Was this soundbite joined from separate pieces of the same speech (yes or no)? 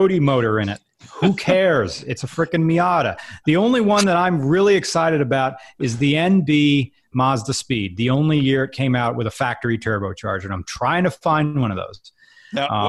no